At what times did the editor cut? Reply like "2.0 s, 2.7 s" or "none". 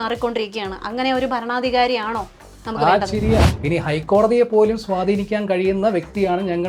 3.4 s